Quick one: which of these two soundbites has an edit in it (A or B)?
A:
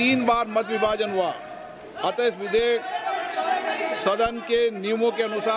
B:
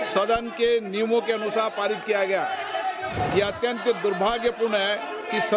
B